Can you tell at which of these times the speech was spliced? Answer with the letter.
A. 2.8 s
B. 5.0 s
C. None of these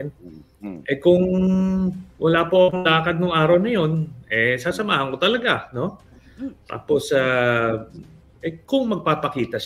C